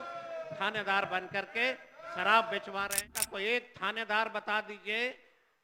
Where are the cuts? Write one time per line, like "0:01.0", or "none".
0:03.1